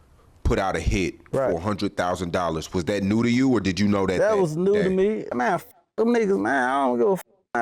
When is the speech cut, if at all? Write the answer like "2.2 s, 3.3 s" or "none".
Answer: 5.3 s